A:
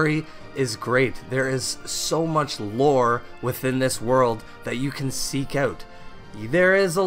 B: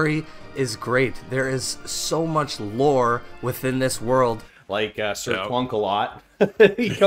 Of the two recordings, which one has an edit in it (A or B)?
B